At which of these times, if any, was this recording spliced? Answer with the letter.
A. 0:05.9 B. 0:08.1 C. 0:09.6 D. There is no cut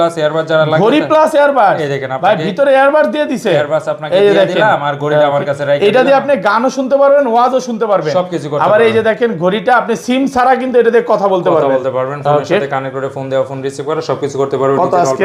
D